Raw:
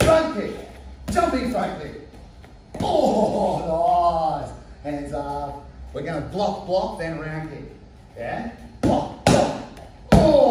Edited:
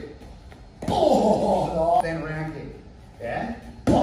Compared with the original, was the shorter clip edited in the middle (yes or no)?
yes